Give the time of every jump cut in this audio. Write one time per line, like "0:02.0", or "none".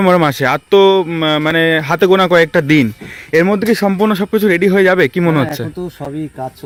none